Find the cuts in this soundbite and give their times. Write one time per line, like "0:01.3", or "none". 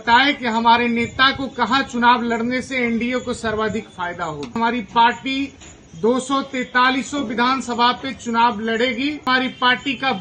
0:04.5
0:09.3

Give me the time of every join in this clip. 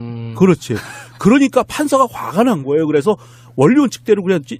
none

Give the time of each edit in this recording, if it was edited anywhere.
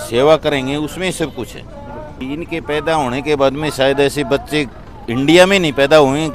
0:02.1

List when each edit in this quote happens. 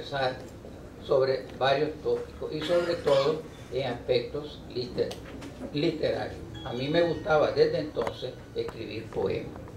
0:05.4

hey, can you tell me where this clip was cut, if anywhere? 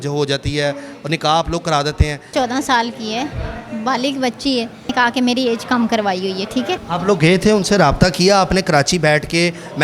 0:02.3
0:04.9
0:06.8

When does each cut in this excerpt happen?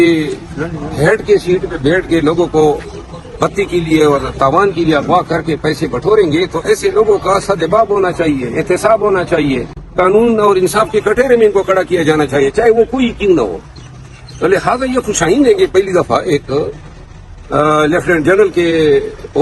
none

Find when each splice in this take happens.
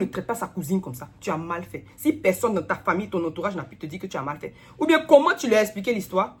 none

